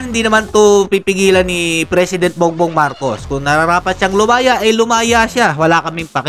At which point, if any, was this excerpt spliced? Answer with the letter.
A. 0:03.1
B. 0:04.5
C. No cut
C